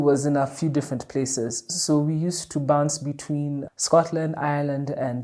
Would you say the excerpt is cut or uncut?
uncut